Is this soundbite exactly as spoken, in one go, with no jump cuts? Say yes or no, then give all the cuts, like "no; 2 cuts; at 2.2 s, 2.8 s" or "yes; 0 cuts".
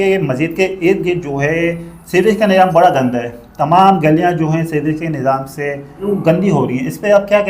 no; 1 cut; at 6.0 s